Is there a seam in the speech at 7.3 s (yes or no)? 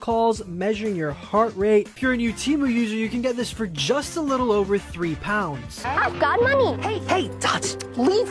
no